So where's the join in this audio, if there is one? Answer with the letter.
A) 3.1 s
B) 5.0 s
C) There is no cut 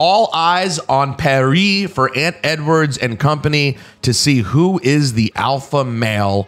C